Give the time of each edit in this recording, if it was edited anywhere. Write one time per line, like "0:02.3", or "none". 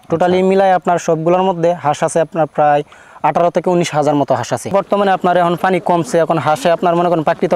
0:04.7